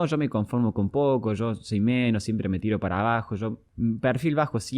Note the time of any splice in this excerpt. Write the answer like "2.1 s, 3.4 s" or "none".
3.6 s